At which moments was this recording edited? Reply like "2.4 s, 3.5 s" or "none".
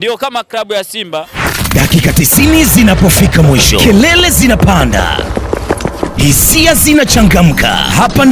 1.5 s